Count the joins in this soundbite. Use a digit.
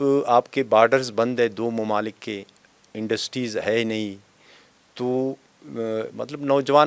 0